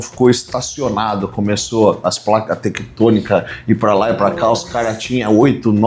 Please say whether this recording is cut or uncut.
uncut